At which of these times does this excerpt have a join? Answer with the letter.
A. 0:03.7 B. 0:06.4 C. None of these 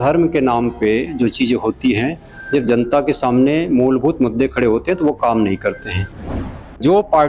B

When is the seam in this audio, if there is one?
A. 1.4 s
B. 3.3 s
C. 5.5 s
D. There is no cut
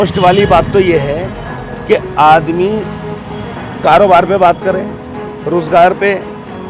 D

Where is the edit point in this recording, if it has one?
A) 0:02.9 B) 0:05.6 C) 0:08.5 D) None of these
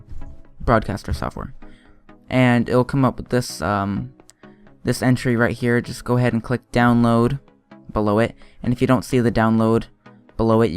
C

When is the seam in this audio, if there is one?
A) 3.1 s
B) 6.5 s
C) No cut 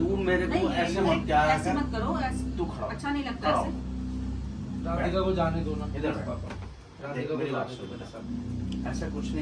C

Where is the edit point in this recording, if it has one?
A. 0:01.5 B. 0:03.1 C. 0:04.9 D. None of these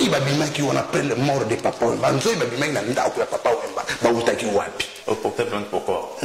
C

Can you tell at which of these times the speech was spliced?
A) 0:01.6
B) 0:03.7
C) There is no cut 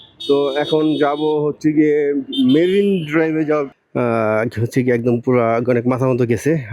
B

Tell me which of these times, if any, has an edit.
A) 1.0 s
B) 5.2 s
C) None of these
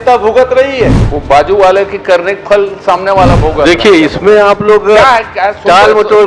A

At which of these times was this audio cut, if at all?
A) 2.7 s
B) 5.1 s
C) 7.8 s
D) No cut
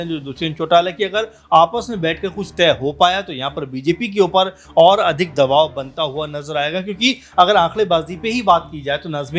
D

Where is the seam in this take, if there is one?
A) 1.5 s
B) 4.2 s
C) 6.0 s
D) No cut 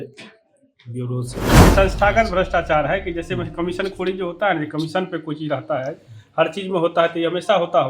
A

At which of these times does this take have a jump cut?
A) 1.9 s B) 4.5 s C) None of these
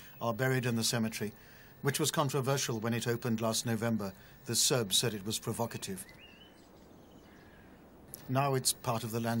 C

